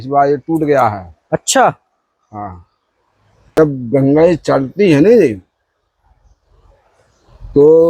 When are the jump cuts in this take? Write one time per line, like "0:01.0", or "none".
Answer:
0:03.6